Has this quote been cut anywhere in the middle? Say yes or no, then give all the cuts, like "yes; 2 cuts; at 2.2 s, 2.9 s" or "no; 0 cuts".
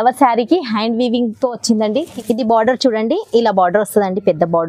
yes; 1 cut; at 2.1 s